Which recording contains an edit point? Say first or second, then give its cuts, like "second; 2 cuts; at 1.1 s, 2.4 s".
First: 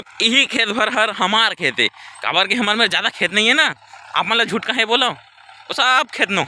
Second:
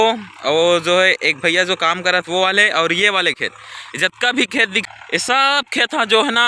second; 1 cut; at 4.8 s